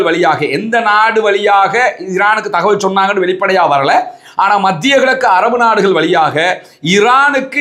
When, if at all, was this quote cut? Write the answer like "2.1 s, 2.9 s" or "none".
none